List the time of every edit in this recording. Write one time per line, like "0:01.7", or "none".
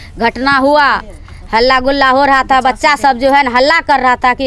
none